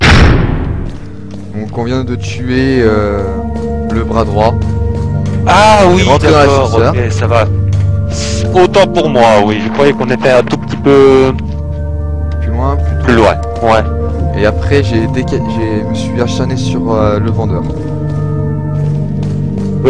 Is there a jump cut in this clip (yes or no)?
no